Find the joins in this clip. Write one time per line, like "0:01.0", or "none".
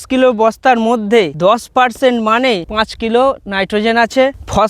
0:02.8